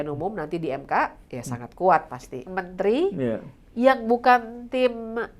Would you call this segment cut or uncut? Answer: cut